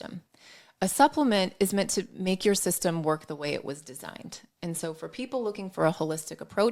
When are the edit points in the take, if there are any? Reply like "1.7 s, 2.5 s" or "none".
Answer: none